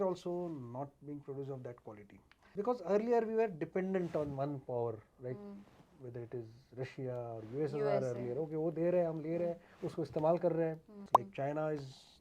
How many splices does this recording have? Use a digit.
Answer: 2